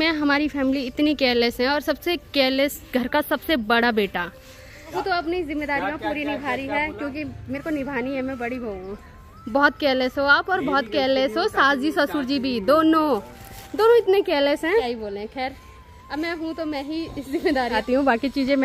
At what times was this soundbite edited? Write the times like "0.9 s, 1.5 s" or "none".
none

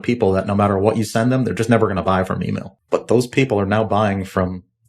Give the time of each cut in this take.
2.7 s

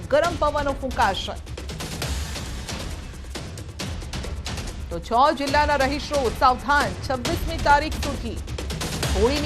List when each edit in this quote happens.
8.2 s

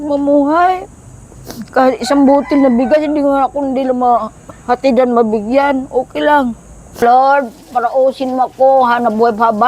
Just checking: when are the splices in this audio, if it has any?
7.0 s

